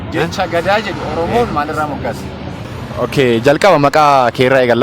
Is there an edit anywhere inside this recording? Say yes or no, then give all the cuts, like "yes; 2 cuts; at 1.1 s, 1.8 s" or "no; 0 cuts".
yes; 1 cut; at 2.8 s